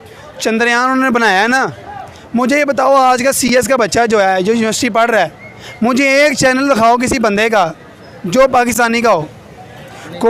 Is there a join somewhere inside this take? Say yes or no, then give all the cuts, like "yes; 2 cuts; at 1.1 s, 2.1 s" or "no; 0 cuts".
no; 0 cuts